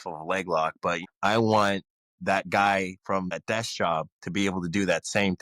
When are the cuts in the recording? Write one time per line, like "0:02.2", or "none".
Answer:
0:01.0
0:03.3